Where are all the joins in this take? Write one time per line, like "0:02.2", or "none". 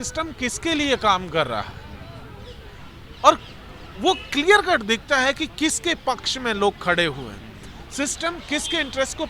none